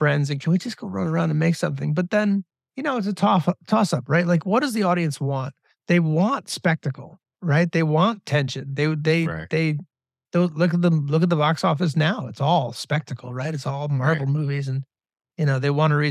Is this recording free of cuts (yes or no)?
no